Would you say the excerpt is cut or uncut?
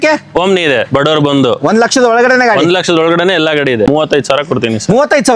cut